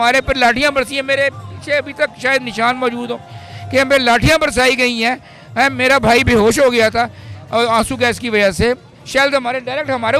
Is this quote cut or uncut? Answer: uncut